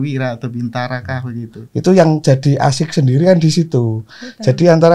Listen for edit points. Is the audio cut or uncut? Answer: cut